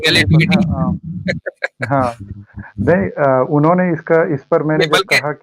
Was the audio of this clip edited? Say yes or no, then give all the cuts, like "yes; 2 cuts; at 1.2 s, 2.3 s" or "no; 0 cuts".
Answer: no; 0 cuts